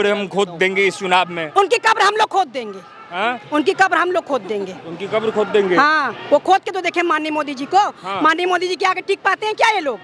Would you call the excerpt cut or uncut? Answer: uncut